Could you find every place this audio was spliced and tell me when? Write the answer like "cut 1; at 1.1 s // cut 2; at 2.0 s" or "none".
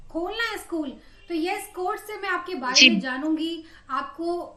none